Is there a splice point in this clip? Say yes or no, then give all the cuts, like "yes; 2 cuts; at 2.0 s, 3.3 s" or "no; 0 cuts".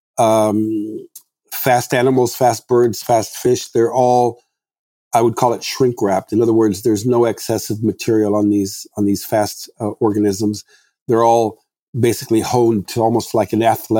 no; 0 cuts